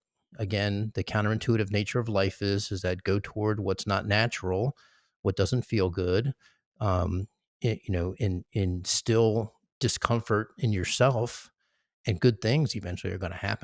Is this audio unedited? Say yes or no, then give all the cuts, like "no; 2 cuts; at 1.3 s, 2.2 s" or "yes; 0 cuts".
yes; 0 cuts